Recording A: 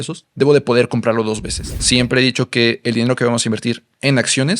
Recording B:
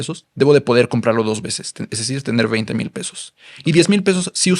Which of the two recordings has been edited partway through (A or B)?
A